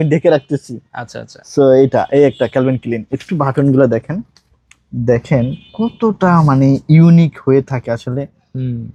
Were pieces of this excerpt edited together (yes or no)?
no